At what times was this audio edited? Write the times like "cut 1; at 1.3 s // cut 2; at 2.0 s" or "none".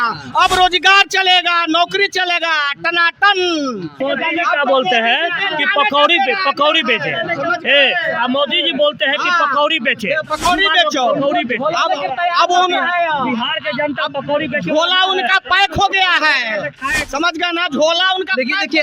cut 1; at 4.0 s